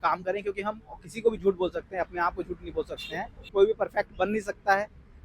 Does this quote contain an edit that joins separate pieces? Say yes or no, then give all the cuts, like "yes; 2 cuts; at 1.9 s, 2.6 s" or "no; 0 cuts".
yes; 1 cut; at 3.5 s